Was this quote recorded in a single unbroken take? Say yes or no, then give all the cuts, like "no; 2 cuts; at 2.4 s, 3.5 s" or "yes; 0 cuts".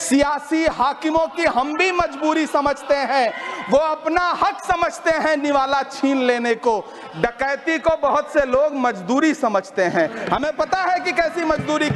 yes; 0 cuts